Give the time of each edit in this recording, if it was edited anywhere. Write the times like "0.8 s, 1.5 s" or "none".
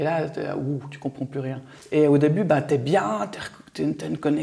1.7 s